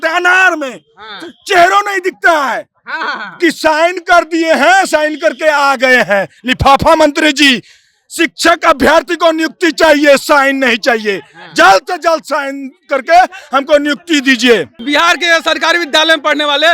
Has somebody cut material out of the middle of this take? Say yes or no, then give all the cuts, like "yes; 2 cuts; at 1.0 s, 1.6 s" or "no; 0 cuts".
yes; 1 cut; at 14.7 s